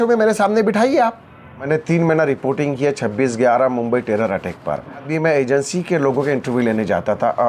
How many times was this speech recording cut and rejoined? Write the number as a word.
two